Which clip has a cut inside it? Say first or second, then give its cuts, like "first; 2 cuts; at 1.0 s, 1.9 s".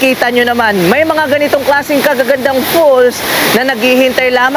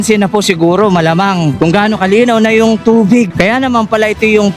second; 2 cuts; at 1.5 s, 3.3 s